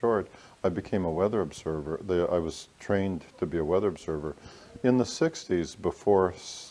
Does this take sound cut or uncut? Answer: cut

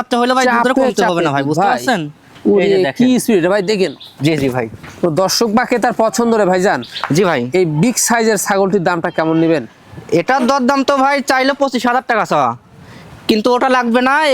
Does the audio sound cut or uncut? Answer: uncut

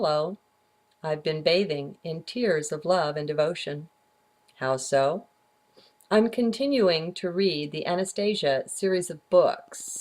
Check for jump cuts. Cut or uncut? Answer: cut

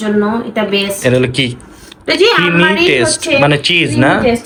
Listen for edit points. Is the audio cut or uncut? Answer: uncut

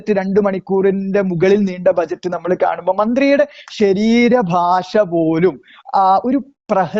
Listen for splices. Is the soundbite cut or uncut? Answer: uncut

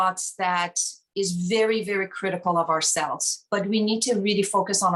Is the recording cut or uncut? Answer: uncut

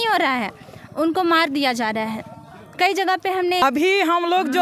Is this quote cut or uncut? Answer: cut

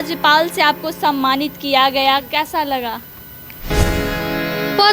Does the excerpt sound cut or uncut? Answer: cut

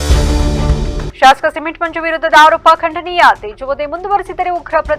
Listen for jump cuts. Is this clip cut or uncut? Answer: cut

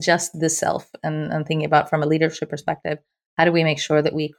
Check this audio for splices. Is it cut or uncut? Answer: uncut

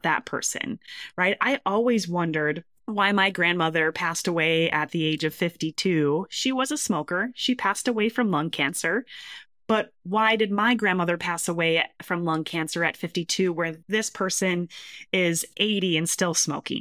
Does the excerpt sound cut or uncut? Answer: uncut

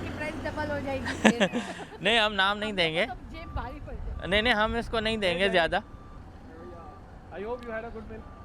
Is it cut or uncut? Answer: uncut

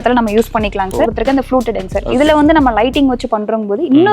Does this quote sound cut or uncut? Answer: cut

